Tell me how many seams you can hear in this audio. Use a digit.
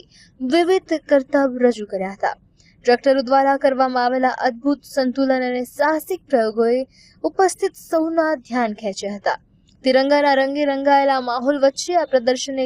1